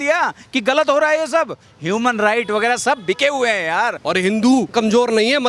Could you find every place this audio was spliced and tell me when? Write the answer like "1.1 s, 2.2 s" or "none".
4.0 s, 4.7 s